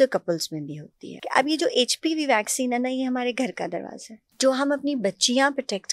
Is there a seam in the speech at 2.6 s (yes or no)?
no